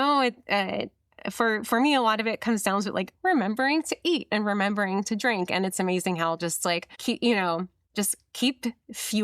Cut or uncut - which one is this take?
cut